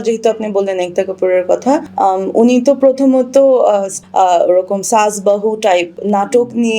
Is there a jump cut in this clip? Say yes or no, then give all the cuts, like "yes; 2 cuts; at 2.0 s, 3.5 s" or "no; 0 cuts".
yes; 3 cuts; at 1.9 s, 3.9 s, 6.0 s